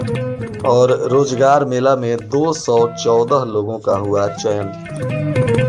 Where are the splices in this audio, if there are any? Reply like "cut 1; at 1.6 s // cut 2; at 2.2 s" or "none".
none